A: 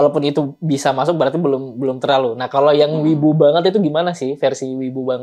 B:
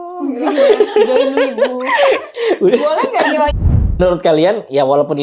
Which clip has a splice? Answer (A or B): B